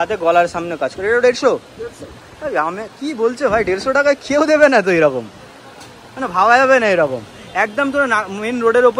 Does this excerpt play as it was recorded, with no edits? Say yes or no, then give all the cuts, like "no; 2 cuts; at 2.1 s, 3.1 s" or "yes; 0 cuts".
yes; 0 cuts